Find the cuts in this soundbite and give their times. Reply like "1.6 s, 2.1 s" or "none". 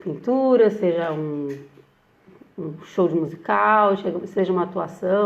none